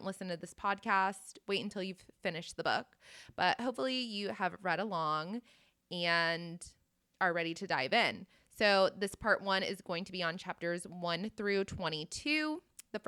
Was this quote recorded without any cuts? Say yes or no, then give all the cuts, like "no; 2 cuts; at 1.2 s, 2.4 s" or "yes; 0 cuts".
yes; 0 cuts